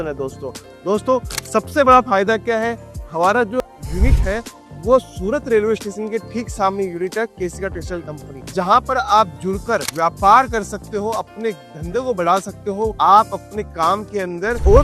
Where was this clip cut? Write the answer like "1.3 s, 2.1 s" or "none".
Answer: 3.6 s